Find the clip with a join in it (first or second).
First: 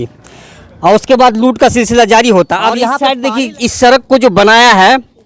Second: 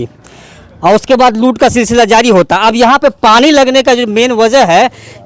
first